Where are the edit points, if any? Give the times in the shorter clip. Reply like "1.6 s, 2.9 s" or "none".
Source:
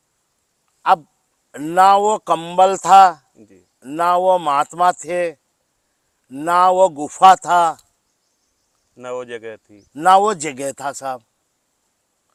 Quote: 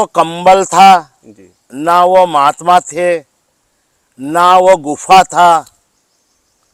none